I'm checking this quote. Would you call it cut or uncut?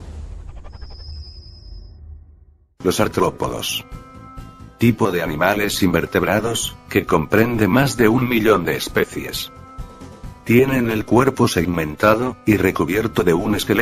uncut